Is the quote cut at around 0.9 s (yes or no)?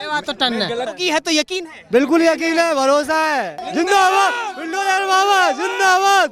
yes